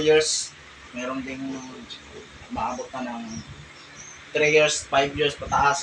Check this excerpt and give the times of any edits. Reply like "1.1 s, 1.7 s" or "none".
none